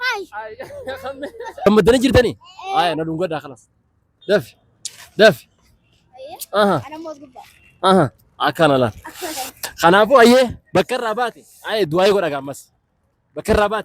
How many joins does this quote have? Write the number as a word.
one